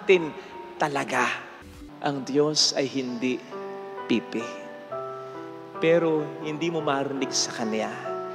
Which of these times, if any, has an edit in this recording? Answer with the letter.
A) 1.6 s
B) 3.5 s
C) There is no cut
A